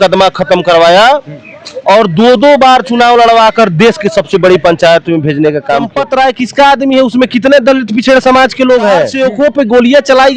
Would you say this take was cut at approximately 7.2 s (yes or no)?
no